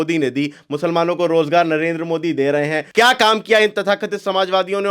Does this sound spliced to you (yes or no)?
yes